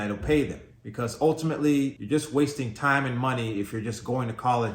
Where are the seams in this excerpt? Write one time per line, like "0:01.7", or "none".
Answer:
0:02.0